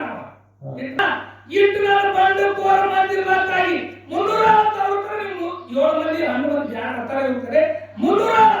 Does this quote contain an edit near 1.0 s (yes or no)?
yes